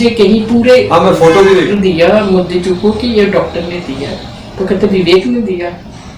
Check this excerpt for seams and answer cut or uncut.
cut